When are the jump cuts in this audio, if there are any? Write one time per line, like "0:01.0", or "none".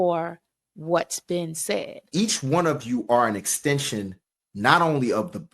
0:02.0